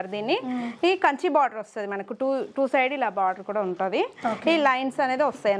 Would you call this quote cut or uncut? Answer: uncut